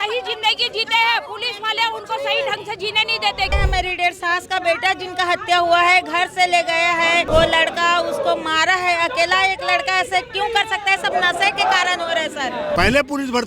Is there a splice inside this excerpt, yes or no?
yes